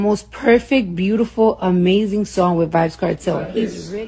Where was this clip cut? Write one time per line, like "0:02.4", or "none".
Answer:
none